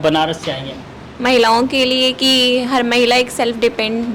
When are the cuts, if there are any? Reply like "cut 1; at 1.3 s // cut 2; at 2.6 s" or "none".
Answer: none